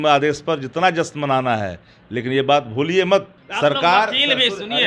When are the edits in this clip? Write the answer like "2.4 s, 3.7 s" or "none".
3.4 s